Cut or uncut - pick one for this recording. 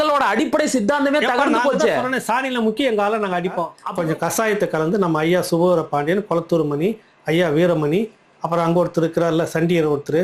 cut